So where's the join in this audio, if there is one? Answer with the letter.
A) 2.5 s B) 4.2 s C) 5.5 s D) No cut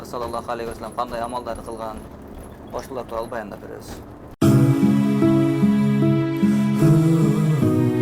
B